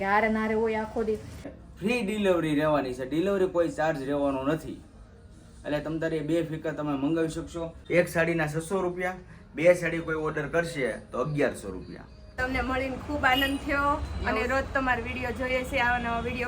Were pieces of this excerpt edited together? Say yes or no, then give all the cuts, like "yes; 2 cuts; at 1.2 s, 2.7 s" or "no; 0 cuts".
yes; 3 cuts; at 1.6 s, 7.8 s, 12.4 s